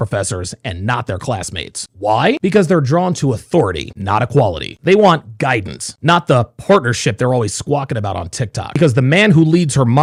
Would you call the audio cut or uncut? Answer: uncut